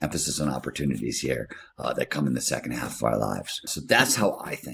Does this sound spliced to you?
yes; 1 cut; at 3.7 s

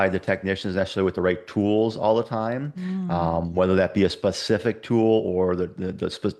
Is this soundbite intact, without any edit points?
yes; 0 cuts

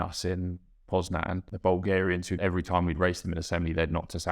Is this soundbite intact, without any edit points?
no; 2 cuts; at 1.5 s, 2.4 s

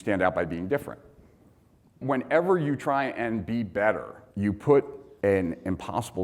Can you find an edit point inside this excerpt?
yes; 2 cuts; at 2.0 s, 5.0 s

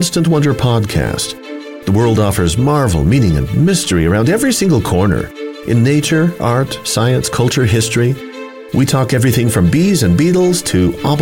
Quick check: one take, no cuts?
yes; 0 cuts

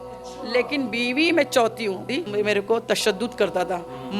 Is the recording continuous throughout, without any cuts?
no; 1 cut; at 2.2 s

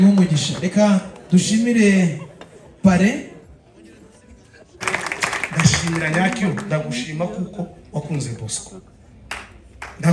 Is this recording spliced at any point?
yes; 1 cut; at 4.8 s

